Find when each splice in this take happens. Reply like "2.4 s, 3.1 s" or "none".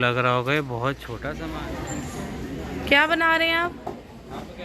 1.2 s